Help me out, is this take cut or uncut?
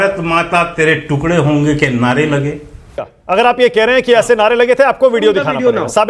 cut